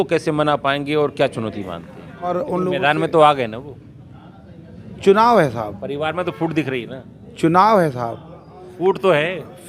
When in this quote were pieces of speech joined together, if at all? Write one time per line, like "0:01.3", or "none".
0:02.3